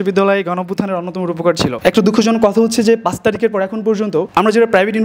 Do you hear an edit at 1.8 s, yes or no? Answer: yes